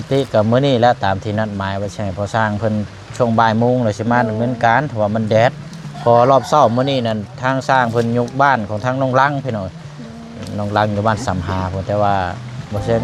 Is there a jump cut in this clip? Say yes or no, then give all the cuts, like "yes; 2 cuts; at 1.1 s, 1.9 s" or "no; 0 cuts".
no; 0 cuts